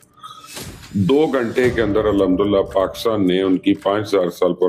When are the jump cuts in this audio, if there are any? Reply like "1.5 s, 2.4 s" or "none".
none